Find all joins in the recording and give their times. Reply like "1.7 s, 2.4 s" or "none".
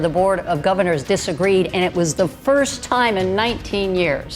none